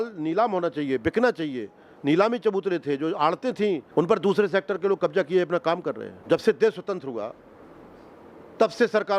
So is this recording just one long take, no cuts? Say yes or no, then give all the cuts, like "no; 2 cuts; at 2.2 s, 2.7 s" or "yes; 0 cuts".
no; 2 cuts; at 3.8 s, 6.1 s